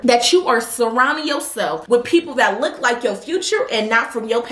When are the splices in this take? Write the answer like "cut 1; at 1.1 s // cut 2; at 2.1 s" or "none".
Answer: none